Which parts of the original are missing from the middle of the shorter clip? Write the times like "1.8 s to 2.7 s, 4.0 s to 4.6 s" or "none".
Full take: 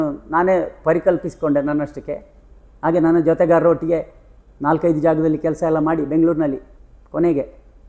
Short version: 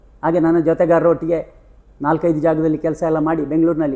none